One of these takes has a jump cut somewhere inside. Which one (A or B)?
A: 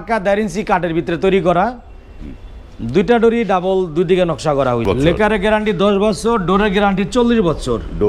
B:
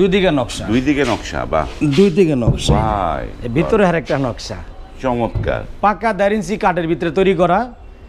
A